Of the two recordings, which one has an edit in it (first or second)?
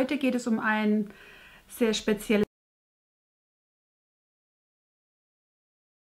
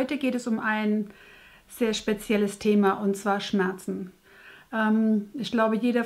second